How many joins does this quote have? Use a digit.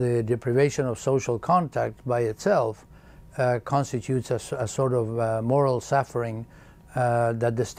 1